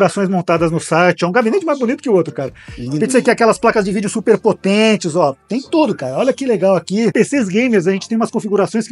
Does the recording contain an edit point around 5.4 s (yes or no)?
no